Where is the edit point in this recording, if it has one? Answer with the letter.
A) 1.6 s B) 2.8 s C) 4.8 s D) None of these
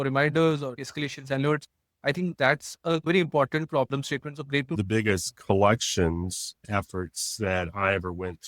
C